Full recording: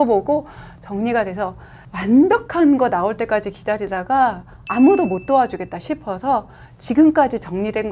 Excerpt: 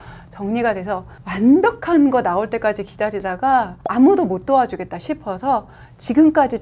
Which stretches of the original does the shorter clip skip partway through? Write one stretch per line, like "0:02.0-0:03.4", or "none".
0:01.7-0:01.8
0:04.5-0:04.6